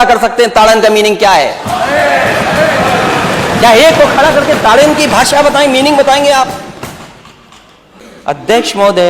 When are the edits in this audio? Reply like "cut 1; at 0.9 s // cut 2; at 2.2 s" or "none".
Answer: cut 1; at 8.1 s